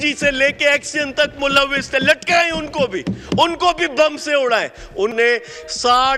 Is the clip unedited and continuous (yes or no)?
no